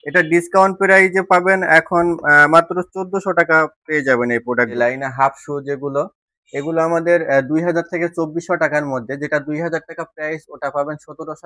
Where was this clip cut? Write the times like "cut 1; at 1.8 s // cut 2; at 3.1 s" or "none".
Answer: cut 1; at 4.7 s